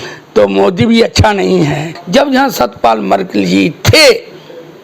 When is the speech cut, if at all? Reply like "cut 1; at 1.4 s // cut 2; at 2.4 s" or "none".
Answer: cut 1; at 1.9 s